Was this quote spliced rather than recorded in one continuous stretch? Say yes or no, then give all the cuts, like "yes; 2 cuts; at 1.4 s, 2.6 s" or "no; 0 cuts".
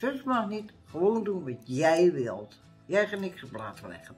no; 0 cuts